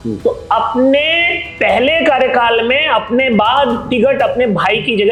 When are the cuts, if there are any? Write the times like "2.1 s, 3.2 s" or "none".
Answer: none